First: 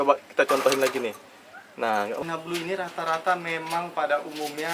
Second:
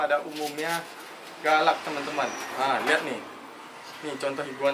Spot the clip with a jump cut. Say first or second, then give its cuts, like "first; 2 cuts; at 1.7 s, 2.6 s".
first; 1 cut; at 2.2 s